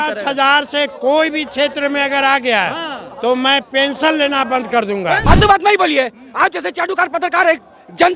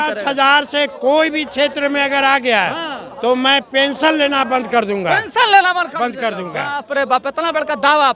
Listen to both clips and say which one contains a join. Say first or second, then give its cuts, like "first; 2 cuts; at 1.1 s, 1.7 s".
first; 1 cut; at 5.2 s